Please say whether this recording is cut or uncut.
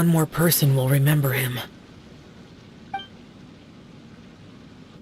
uncut